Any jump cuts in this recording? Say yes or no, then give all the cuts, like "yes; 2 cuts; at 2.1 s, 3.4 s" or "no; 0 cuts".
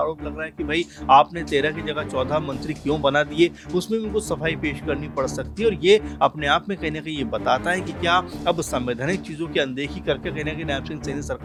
no; 0 cuts